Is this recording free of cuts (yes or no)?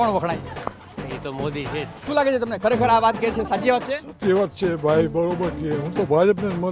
no